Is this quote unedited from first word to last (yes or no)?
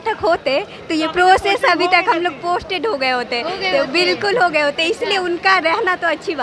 yes